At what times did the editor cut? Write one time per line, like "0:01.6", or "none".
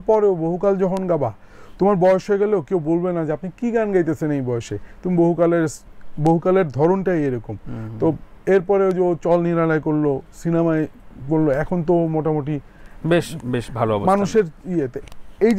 none